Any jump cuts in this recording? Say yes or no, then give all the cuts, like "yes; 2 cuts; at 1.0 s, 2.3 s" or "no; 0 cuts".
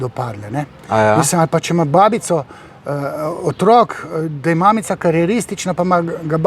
no; 0 cuts